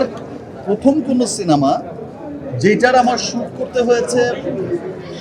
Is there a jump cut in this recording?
no; 0 cuts

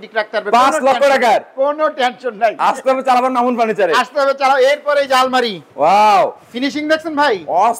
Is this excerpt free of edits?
yes; 0 cuts

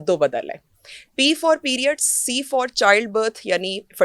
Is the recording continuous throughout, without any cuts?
yes; 0 cuts

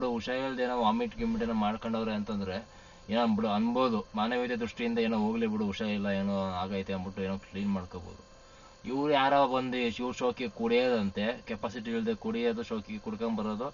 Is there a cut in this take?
no; 0 cuts

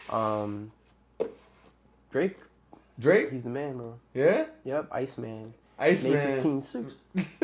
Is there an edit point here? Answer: no; 0 cuts

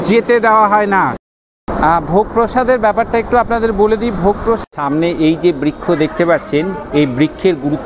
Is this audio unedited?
no; 2 cuts; at 1.2 s, 4.7 s

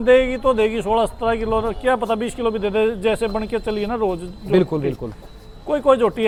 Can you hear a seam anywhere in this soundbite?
no; 0 cuts

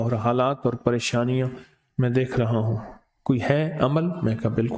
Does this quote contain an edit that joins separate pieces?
no; 0 cuts

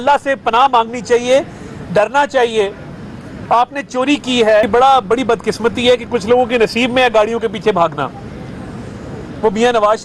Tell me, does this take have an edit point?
yes; 1 cut; at 4.7 s

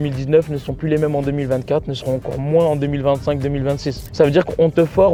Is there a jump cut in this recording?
no; 0 cuts

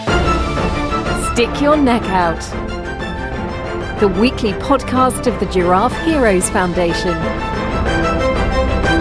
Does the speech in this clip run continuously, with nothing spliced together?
yes; 0 cuts

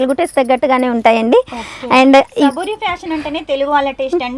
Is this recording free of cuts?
yes; 0 cuts

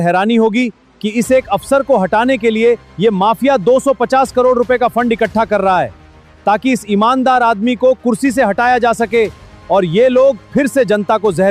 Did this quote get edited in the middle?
no; 0 cuts

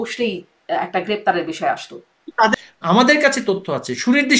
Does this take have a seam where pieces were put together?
yes; 1 cut; at 2.6 s

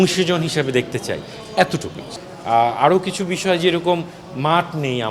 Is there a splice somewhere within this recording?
yes; 1 cut; at 2.0 s

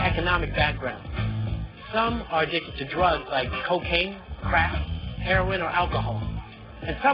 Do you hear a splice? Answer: yes; 1 cut; at 3.4 s

